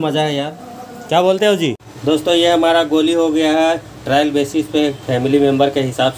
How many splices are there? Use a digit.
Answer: 1